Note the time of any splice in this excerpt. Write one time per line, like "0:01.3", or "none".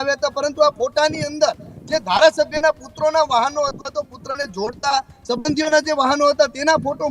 none

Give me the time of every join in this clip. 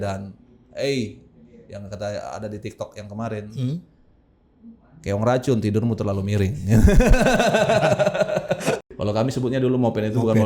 0:08.9

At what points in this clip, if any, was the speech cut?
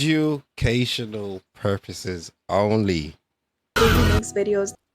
0:03.7

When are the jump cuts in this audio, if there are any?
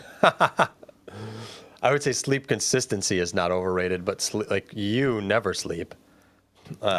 none

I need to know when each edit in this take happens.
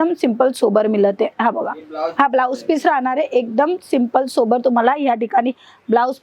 none

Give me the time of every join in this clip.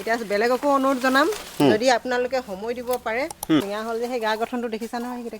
0:03.6

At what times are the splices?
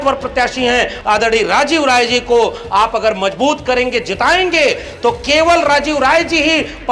0:01.0

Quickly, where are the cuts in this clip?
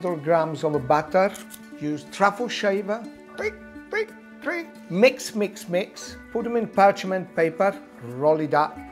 0:06.8

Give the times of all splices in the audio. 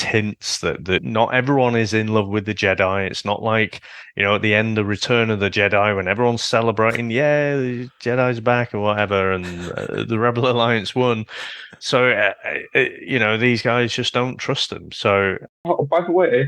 0:01.1
0:15.5

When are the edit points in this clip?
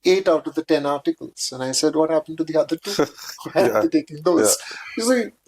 none

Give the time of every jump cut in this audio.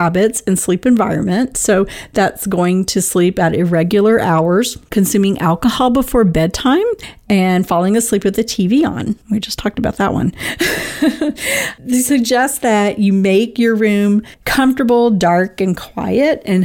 0:04.8
0:07.1
0:09.2
0:14.4

